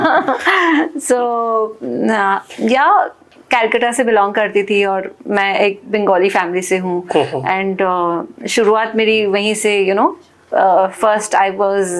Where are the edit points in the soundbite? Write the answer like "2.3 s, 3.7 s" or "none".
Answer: none